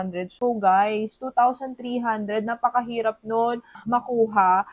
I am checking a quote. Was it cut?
yes; 1 cut; at 3.8 s

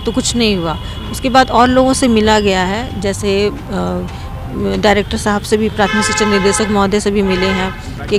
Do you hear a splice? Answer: no; 0 cuts

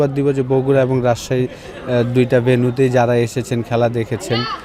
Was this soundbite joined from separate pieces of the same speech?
no; 0 cuts

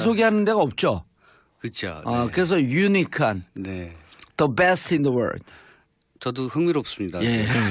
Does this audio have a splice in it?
no; 0 cuts

